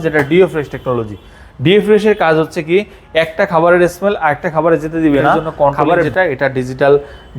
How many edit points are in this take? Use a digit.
1